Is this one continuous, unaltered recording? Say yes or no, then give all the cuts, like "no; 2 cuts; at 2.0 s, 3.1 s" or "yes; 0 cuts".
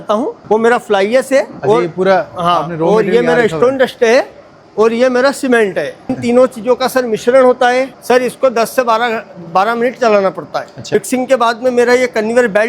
no; 3 cuts; at 6.1 s, 7.9 s, 10.9 s